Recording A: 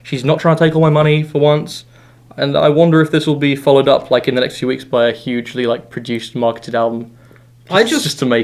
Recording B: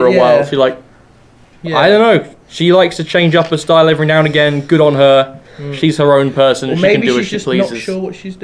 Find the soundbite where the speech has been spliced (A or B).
B